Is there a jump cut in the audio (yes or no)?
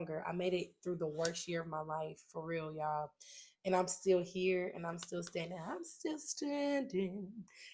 no